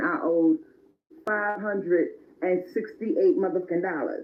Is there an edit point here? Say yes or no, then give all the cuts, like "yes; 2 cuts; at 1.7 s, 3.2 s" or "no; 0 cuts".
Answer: no; 0 cuts